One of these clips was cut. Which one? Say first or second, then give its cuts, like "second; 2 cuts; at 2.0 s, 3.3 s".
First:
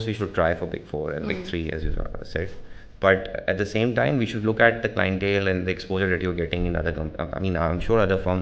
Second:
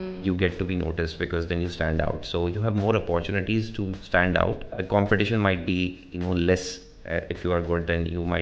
second; 1 cut; at 4.8 s